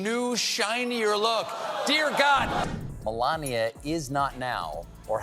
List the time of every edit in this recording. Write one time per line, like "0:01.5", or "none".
0:02.7